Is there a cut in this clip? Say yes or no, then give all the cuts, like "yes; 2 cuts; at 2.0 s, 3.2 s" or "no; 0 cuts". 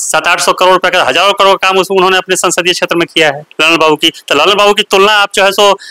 yes; 1 cut; at 3.5 s